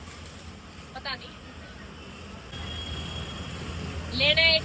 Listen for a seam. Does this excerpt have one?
yes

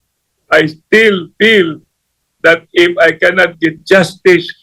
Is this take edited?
no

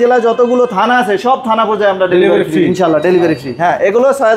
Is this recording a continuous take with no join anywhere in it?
yes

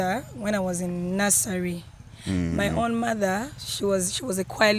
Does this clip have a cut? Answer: no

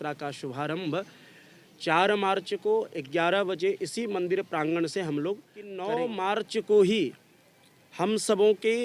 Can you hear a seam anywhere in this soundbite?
yes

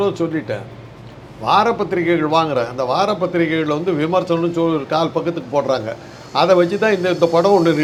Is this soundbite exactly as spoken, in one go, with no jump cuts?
yes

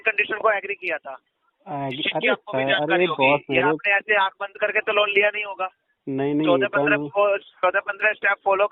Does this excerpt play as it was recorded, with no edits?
yes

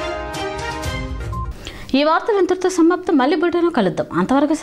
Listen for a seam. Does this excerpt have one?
no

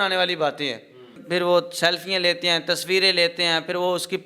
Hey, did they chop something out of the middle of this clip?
yes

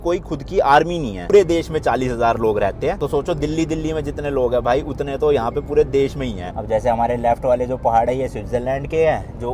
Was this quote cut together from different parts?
yes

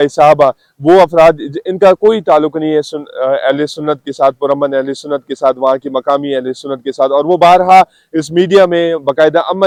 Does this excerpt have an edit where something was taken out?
no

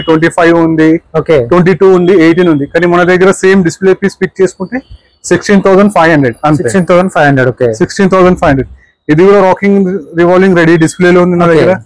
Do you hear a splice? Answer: no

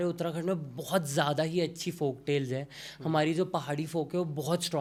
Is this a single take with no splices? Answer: yes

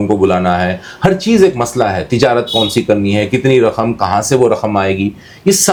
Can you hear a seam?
no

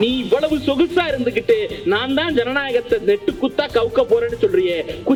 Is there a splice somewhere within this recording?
no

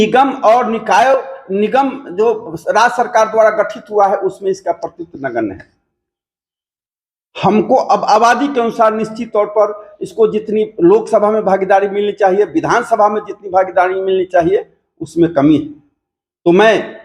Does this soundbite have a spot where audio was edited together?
no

